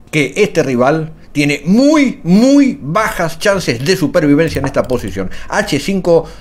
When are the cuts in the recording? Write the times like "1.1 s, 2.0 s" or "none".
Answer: none